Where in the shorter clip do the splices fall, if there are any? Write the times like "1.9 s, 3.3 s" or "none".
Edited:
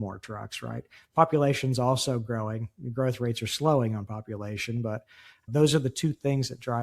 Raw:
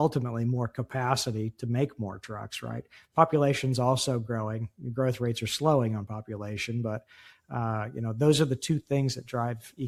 5.5 s